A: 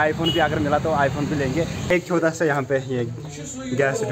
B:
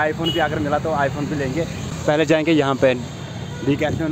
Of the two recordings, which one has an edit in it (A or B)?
A